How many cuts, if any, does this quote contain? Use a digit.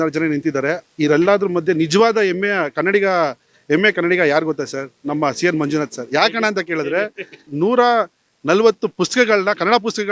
1